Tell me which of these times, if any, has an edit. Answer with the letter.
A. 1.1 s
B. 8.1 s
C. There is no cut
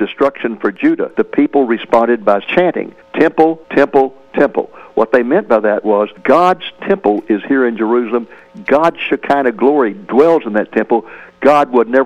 A